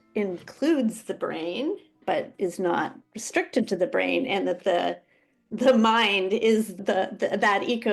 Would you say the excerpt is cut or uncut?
cut